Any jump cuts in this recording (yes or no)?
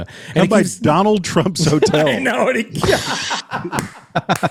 no